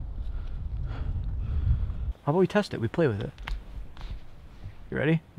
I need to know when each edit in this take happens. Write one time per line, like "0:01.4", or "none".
0:02.1